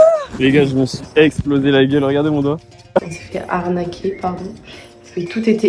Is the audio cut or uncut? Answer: cut